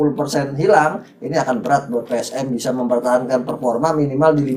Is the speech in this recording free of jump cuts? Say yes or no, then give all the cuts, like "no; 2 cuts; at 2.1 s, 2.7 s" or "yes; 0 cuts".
yes; 0 cuts